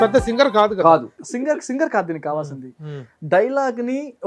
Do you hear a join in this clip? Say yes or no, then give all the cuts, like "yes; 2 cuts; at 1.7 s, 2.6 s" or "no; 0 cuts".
yes; 1 cut; at 1.2 s